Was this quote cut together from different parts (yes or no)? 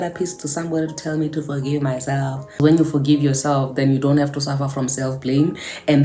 yes